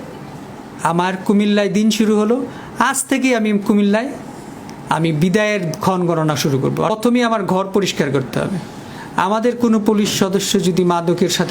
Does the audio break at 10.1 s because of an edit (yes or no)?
no